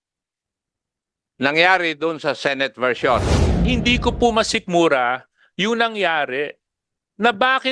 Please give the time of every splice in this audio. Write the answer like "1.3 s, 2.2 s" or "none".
3.6 s